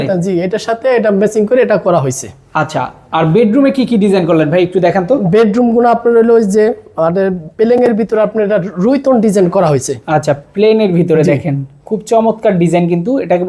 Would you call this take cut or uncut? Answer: uncut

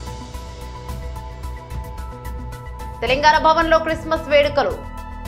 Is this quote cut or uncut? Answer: uncut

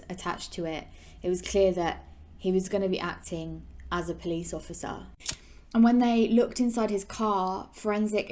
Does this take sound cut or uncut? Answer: cut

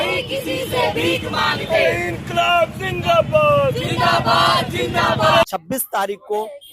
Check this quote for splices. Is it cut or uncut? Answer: cut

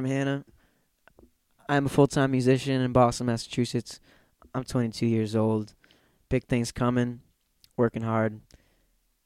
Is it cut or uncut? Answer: uncut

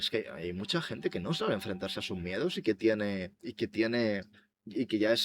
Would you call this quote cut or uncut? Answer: uncut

